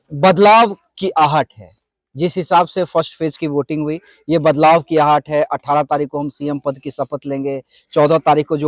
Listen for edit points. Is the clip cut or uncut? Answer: uncut